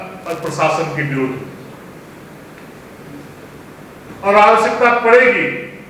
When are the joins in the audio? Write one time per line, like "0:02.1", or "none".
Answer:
none